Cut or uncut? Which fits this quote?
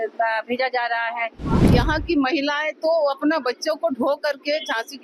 cut